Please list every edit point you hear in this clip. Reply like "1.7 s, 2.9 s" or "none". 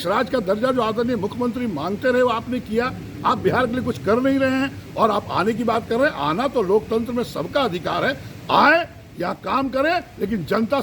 none